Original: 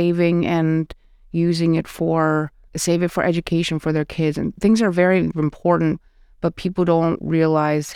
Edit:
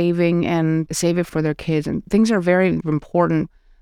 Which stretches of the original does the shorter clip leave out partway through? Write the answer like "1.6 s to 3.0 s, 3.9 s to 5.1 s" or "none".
1.2 s to 3.7 s

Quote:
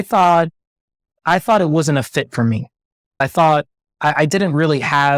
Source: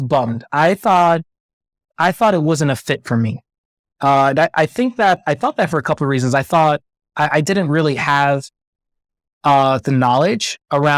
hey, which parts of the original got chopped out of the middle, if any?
3.9 s to 6.4 s

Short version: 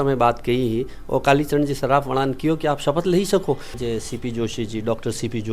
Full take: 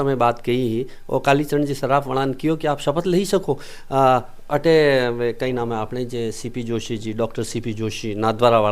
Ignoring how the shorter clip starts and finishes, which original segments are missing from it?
3.7 s to 6.0 s

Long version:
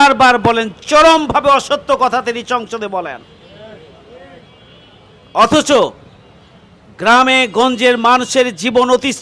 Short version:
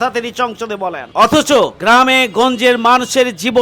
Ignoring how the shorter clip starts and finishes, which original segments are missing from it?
3.1 s to 5.2 s, 6.0 s to 7.0 s

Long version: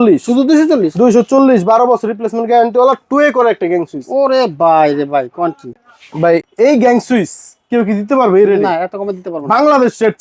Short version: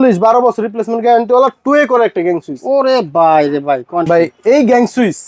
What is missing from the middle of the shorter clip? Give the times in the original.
5.5 s to 6.2 s

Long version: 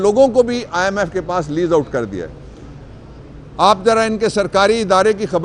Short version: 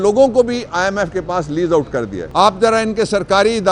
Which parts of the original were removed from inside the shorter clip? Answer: 2.2 s to 3.4 s

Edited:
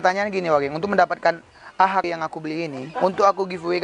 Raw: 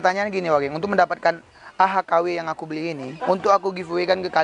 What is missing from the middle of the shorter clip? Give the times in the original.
2.1 s to 2.3 s

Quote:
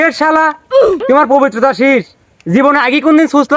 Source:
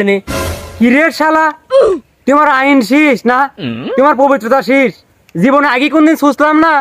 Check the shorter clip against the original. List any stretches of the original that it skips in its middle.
2.0 s to 3.9 s

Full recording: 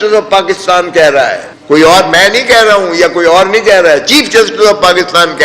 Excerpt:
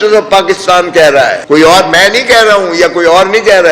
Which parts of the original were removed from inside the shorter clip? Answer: 1.4 s to 1.6 s

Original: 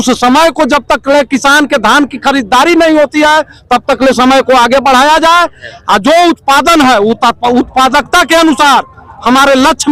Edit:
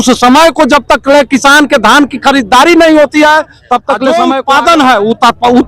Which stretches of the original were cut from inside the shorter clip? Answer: 4.1 s to 6.1 s

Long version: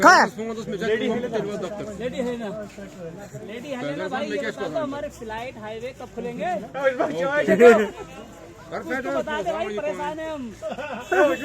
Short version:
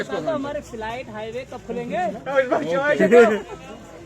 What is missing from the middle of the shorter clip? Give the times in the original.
none

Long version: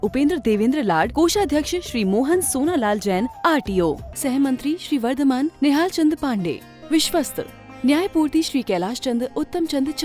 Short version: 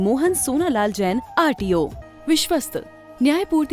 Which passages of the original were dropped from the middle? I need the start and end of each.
4.1 s to 6.7 s

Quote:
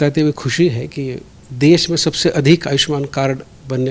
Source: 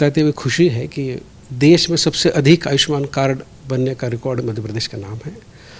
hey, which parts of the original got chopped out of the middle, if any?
none

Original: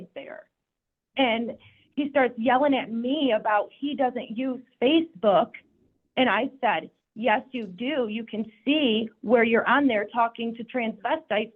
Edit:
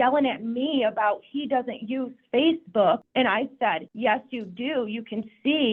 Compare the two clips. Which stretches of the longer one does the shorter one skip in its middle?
6.1 s to 6.8 s

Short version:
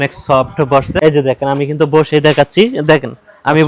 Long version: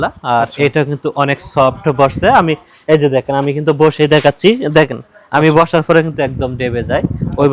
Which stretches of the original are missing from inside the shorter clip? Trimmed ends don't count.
2.2 s to 2.8 s

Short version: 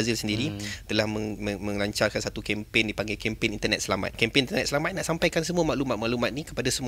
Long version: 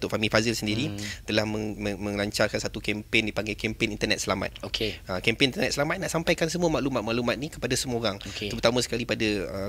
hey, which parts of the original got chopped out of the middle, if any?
4.5 s to 5.2 s

